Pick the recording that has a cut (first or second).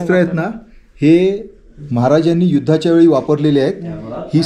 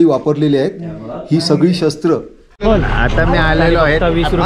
second